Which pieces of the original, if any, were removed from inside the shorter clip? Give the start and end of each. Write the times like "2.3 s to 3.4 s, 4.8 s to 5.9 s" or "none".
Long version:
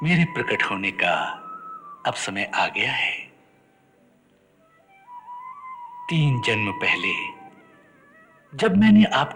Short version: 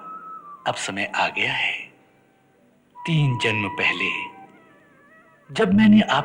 4.4 s to 6.0 s